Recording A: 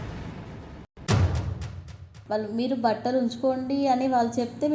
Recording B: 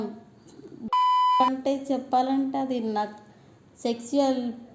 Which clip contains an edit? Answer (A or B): A